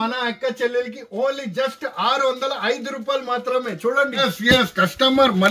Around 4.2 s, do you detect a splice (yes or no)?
yes